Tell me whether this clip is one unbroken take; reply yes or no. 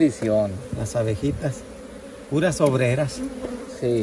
yes